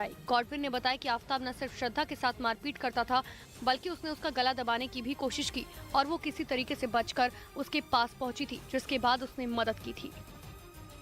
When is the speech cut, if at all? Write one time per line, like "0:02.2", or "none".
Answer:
0:10.1

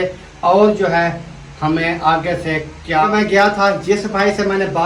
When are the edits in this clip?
0:03.1

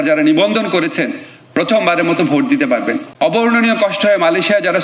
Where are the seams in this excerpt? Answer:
0:03.1

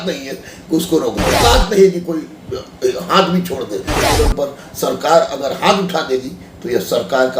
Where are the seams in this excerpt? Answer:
0:01.4
0:04.0

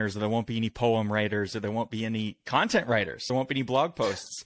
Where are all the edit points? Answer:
none

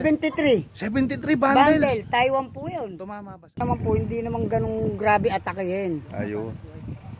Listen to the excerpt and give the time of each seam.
0:03.6

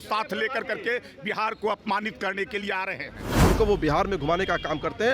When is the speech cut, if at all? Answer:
0:03.5

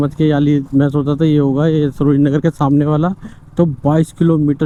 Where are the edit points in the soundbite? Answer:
none

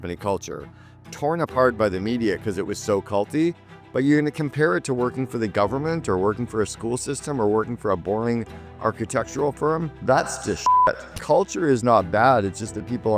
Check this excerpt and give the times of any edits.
0:09.9
0:11.1

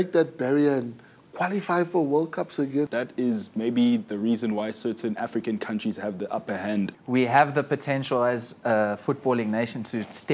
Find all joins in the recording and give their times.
0:02.9
0:06.9

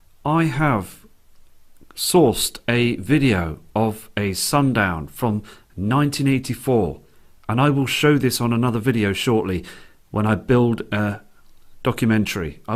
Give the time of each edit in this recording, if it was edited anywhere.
none

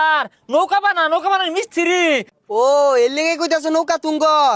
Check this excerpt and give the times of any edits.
0:02.3

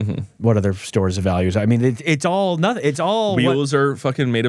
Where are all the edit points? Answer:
none

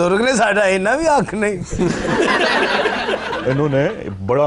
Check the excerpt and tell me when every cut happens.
0:03.3

